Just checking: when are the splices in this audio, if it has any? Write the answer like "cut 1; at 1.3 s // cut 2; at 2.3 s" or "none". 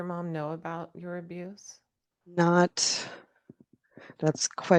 none